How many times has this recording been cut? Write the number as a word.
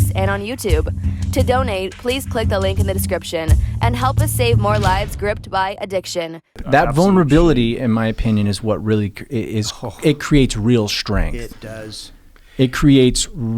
one